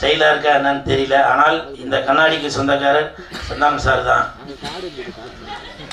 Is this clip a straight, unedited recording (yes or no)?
yes